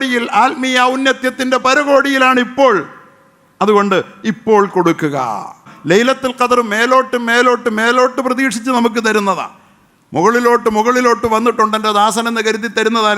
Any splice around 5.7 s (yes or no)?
yes